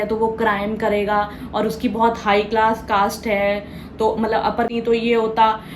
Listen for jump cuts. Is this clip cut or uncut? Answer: cut